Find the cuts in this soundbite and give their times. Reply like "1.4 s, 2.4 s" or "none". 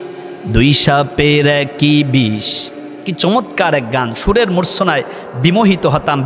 none